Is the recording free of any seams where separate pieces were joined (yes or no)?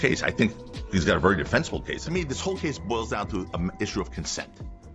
yes